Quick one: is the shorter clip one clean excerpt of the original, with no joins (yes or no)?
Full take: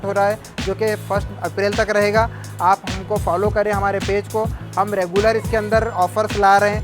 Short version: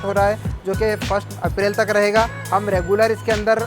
no